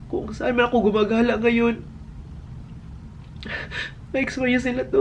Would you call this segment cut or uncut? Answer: uncut